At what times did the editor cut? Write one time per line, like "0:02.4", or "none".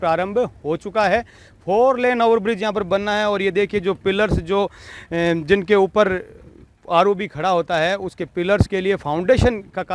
none